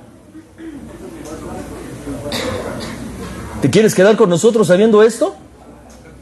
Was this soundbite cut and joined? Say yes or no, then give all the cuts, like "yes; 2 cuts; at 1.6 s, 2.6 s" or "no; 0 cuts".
no; 0 cuts